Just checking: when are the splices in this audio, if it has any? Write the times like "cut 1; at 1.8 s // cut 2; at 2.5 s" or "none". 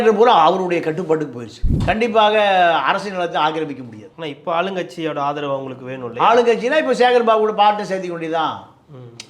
cut 1; at 1.7 s